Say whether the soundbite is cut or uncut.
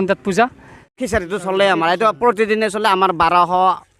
cut